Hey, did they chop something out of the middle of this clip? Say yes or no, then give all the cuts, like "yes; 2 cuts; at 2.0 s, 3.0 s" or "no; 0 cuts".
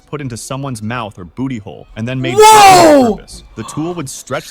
yes; 1 cut; at 1.2 s